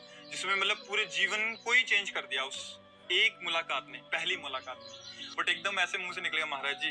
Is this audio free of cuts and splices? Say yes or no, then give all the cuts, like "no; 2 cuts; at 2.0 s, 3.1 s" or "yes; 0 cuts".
no; 1 cut; at 5.1 s